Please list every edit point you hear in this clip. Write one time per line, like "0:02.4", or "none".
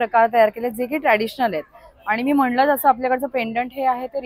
none